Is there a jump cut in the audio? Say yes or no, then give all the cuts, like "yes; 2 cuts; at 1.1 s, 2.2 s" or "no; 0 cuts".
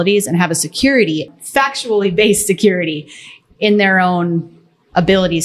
yes; 1 cut; at 1.3 s